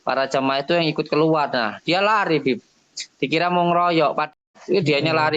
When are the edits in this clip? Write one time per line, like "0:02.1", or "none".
0:04.5

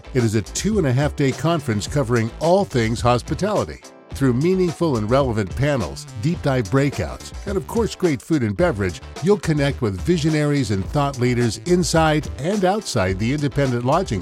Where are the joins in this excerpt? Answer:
none

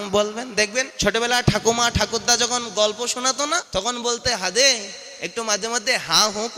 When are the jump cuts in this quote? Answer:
0:00.9
0:03.7

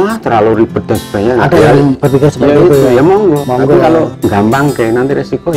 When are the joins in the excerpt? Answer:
0:03.5
0:04.1

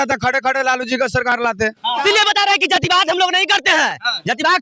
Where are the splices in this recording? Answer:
0:02.0

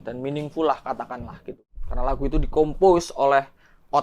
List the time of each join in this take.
0:01.6

